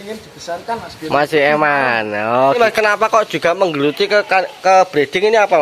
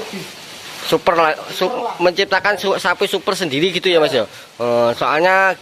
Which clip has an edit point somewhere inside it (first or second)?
first